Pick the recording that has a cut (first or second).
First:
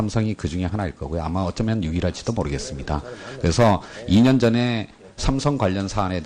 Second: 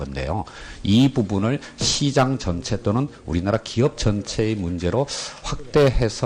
second